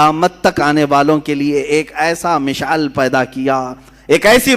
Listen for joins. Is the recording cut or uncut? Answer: uncut